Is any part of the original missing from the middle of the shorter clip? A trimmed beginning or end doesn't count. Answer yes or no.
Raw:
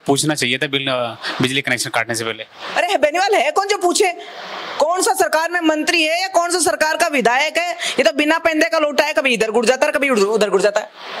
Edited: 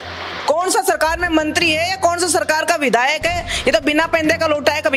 no